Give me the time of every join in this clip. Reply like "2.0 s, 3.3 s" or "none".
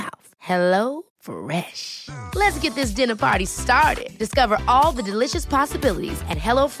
none